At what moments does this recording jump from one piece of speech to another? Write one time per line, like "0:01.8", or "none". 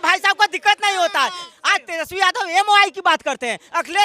0:01.5